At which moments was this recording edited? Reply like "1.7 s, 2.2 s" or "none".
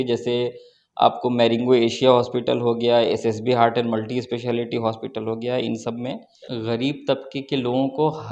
6.3 s